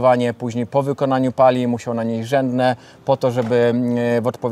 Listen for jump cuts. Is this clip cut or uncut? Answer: uncut